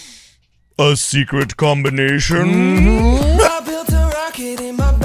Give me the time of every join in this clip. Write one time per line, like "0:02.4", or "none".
0:03.5